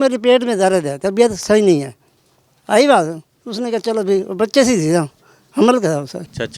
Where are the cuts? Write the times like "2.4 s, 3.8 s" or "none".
none